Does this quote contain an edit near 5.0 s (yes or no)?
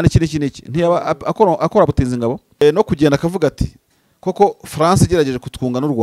no